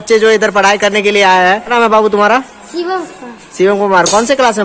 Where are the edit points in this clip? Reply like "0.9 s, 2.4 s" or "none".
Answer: none